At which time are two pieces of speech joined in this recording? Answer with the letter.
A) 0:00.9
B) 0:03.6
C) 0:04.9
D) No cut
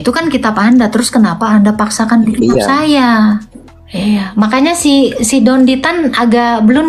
B